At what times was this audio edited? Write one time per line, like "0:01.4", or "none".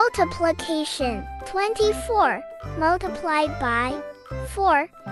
0:01.5